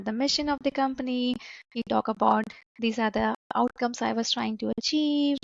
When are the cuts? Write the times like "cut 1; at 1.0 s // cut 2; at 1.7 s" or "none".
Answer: none